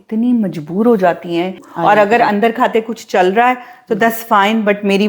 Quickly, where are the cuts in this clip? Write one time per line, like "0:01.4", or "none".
0:01.7